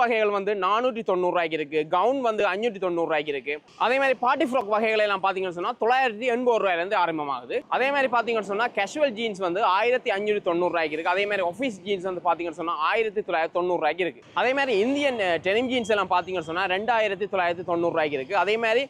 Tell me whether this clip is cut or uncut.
uncut